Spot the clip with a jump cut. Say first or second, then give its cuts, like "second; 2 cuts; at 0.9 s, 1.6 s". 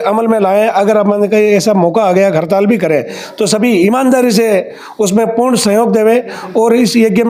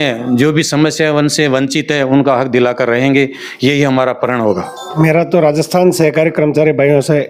second; 1 cut; at 5.0 s